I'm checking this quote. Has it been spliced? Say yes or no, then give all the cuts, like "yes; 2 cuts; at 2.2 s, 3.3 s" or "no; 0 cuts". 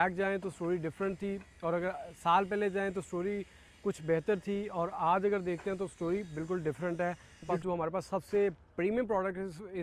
yes; 1 cut; at 7.5 s